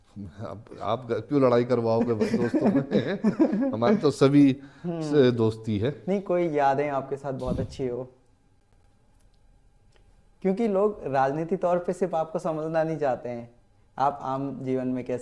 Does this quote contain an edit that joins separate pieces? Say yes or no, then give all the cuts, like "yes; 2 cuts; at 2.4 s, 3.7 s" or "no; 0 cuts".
no; 0 cuts